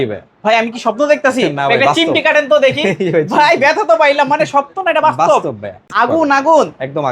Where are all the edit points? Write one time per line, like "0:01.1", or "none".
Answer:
0:05.9